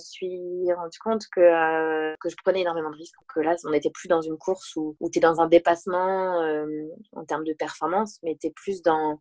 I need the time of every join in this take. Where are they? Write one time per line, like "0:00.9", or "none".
none